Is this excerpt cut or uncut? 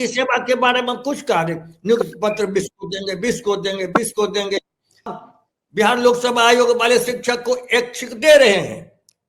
cut